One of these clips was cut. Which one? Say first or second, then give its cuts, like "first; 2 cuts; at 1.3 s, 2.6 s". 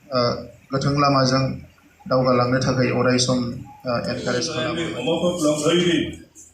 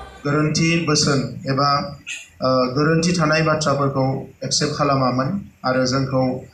first; 1 cut; at 4.6 s